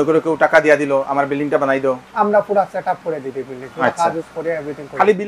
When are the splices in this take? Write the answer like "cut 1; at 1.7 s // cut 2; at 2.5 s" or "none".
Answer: none